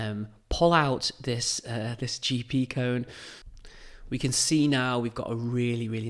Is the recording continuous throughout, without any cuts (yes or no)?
yes